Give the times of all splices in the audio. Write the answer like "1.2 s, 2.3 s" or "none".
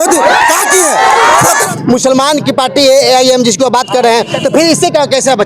1.7 s